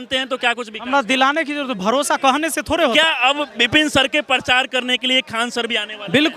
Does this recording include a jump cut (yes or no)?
yes